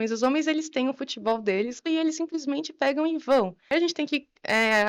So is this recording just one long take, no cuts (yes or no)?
no